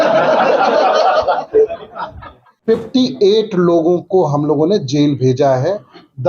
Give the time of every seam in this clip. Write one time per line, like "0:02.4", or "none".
0:02.5